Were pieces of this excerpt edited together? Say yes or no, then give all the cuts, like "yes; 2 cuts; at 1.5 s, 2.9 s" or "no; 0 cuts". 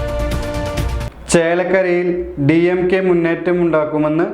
yes; 1 cut; at 0.9 s